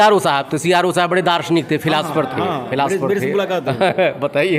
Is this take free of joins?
yes; 0 cuts

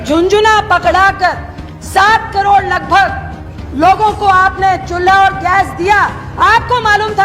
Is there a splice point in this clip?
no; 0 cuts

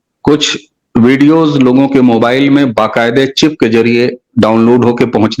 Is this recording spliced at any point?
no; 0 cuts

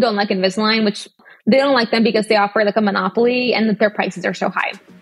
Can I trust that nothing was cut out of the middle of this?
no; 1 cut; at 1.2 s

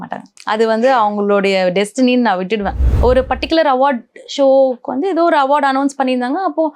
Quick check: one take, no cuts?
no; 1 cut; at 2.9 s

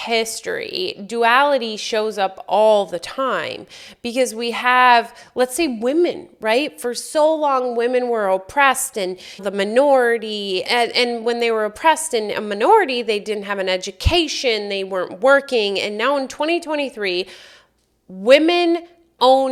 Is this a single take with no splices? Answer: yes; 0 cuts

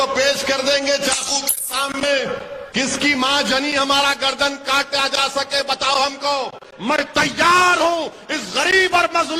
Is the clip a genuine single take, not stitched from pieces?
no; 2 cuts; at 2.6 s, 6.7 s

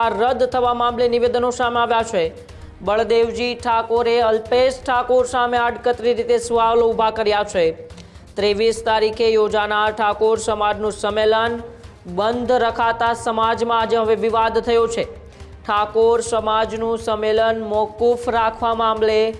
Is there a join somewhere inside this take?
no; 0 cuts

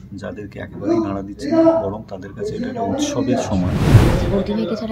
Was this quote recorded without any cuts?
no; 1 cut; at 3.8 s

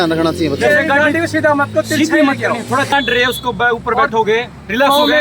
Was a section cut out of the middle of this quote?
yes; 1 cut; at 2.9 s

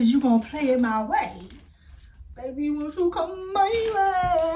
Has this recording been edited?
no; 0 cuts

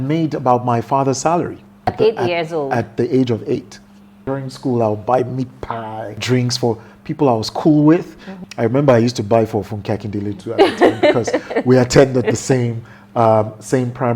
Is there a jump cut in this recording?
yes; 4 cuts; at 1.9 s, 4.2 s, 6.2 s, 8.3 s

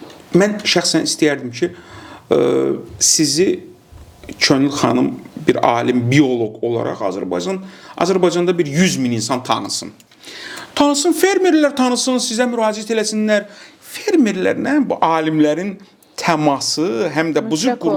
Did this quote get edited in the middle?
no; 0 cuts

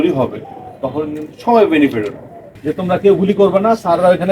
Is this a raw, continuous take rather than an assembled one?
no; 1 cut; at 2.5 s

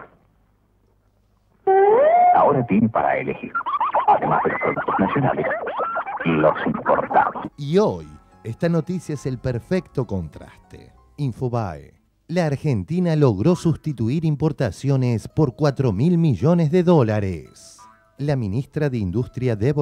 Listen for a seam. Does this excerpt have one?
no; 0 cuts

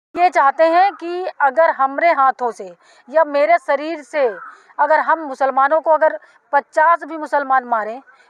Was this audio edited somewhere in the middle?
no; 0 cuts

